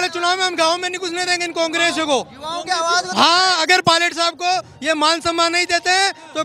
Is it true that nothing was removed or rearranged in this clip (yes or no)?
yes